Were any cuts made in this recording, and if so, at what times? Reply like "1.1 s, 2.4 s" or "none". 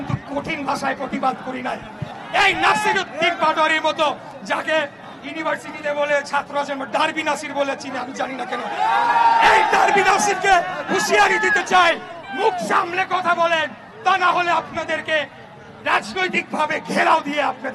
2.1 s